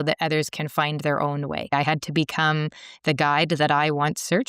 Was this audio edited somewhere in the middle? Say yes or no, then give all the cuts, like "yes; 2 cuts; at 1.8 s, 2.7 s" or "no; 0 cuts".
yes; 1 cut; at 1.7 s